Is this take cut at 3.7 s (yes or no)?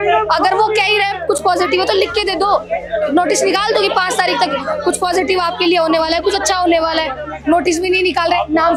no